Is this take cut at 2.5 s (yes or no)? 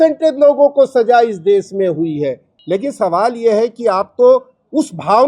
yes